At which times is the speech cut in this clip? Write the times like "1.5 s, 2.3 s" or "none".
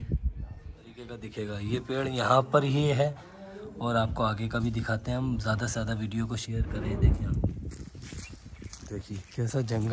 1.2 s, 7.6 s